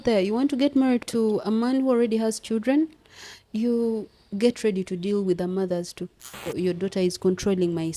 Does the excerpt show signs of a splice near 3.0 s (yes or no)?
no